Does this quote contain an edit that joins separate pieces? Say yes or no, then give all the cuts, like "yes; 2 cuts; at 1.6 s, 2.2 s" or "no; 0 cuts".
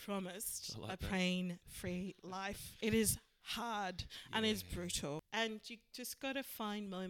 yes; 2 cuts; at 2.7 s, 5.2 s